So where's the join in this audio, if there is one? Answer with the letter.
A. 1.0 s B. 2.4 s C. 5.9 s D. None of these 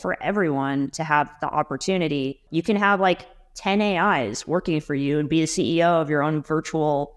B